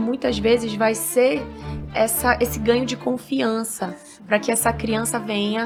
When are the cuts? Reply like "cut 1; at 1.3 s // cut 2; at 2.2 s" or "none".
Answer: none